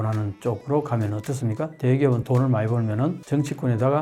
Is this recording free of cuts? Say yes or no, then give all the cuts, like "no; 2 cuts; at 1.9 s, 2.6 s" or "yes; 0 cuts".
yes; 0 cuts